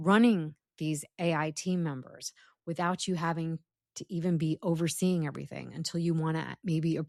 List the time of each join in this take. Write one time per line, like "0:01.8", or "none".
none